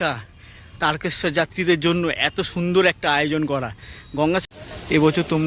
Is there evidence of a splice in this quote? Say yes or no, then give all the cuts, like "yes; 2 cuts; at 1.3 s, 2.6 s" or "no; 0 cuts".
yes; 1 cut; at 4.4 s